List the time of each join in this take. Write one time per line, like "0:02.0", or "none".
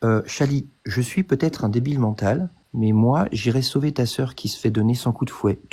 0:02.6